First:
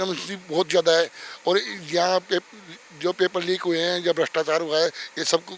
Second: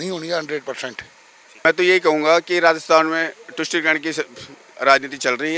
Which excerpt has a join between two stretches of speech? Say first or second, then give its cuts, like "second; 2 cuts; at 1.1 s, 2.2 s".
second; 1 cut; at 1.5 s